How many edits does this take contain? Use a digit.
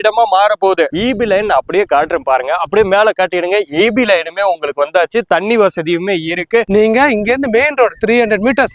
2